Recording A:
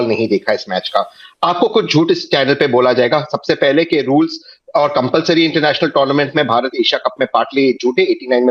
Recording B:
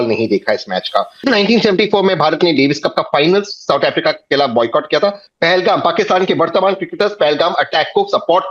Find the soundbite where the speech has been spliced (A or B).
B